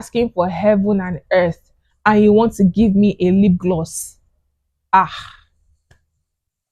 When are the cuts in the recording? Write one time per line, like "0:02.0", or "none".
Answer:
none